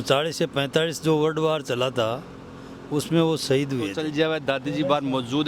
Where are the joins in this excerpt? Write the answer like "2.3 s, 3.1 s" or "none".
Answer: 4.0 s